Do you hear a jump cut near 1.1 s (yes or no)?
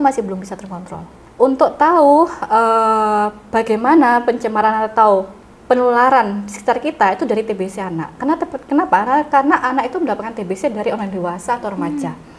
yes